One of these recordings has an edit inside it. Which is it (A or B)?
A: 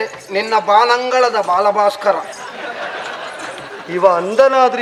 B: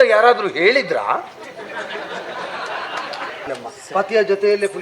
B